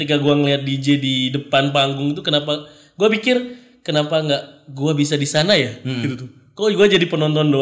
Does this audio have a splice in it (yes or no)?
no